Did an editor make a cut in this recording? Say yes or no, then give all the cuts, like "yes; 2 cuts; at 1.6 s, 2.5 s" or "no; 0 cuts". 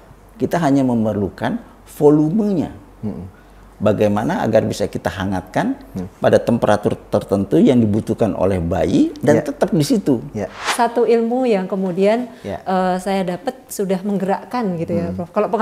yes; 1 cut; at 10.6 s